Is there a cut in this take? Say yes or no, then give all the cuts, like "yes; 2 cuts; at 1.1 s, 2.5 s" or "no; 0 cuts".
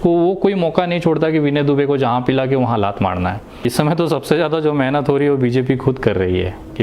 yes; 1 cut; at 3.7 s